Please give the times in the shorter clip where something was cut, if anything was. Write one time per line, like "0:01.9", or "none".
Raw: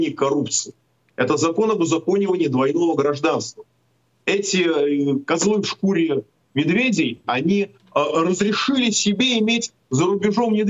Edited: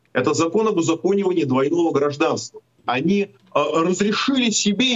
0:02.8